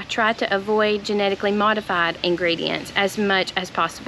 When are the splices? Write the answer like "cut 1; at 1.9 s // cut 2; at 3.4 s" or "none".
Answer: cut 1; at 2.2 s